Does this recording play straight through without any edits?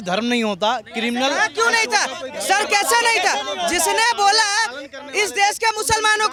yes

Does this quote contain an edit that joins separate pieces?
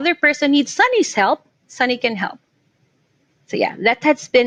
no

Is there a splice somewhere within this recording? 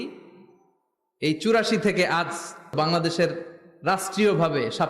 yes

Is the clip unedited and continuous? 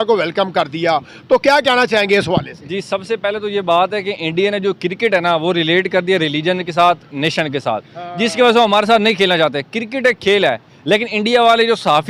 yes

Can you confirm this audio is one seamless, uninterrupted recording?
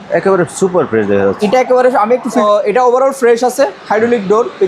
no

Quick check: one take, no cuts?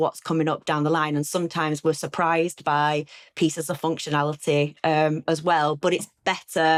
yes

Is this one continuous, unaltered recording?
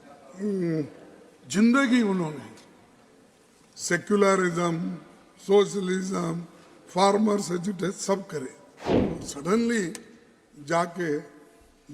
no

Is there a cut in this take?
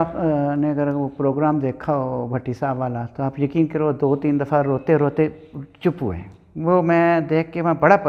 no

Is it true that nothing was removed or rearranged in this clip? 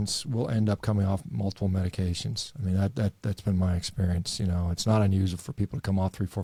yes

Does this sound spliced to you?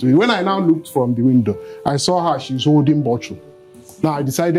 no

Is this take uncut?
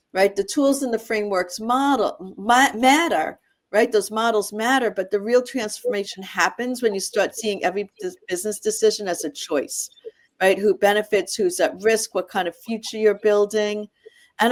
yes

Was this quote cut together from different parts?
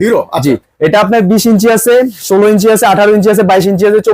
no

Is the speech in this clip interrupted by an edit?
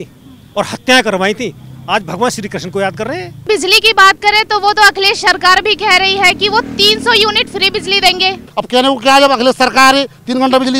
yes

